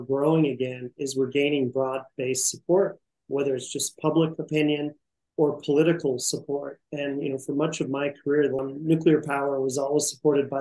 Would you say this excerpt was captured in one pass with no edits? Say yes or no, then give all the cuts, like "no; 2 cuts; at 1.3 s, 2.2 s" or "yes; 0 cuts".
no; 1 cut; at 8.6 s